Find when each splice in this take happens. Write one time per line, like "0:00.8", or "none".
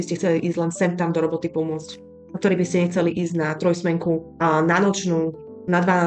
none